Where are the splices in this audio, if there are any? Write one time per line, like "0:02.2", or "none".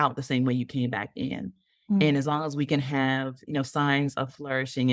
none